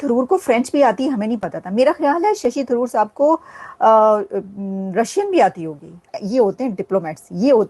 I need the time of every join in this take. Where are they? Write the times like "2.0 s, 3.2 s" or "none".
6.2 s